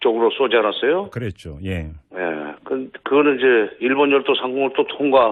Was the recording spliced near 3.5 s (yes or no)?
no